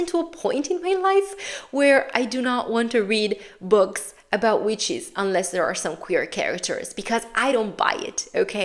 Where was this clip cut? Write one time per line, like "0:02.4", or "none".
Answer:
none